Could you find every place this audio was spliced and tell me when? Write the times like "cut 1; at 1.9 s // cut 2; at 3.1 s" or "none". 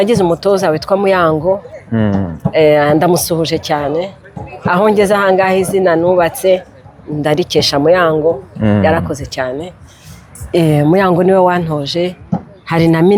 none